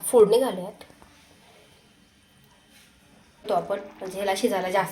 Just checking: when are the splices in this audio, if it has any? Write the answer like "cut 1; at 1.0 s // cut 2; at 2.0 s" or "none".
cut 1; at 3.5 s